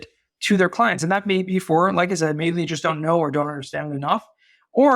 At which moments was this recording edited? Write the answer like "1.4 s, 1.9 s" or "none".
none